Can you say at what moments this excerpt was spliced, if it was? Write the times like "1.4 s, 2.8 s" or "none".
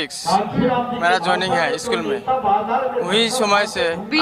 none